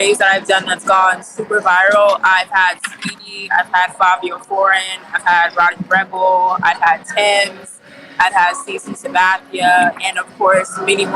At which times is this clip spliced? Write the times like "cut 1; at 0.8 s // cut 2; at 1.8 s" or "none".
none